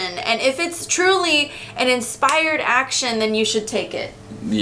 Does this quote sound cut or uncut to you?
uncut